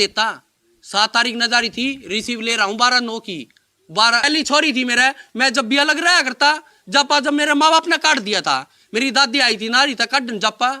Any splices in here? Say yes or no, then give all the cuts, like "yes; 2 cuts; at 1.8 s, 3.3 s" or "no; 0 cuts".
yes; 1 cut; at 4.3 s